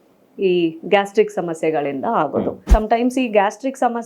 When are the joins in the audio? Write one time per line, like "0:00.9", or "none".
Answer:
0:02.6